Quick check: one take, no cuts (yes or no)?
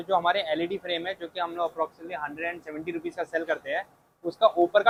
yes